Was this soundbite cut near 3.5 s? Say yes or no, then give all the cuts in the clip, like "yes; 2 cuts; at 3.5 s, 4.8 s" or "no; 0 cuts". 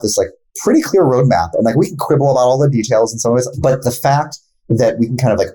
yes; 1 cut; at 3.5 s